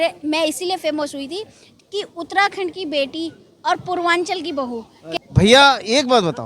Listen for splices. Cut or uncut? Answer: cut